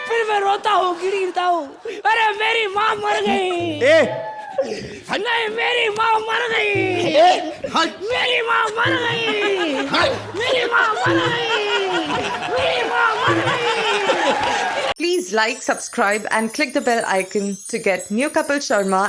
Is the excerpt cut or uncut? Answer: cut